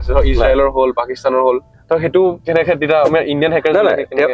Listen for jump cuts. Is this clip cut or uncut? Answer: cut